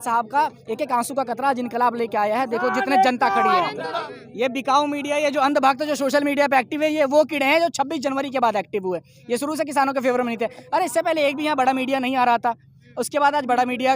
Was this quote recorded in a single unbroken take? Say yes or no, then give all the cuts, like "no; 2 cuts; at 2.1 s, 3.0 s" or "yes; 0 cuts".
no; 1 cut; at 3.9 s